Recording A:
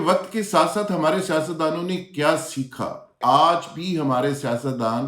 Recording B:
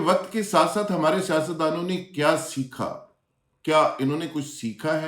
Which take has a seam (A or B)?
A